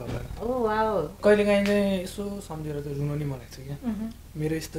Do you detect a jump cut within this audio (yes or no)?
yes